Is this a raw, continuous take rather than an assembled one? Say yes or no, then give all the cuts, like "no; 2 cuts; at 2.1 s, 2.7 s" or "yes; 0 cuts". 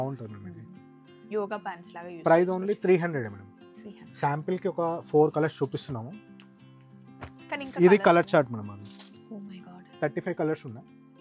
yes; 0 cuts